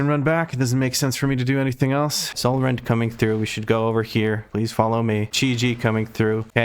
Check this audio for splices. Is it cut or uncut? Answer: cut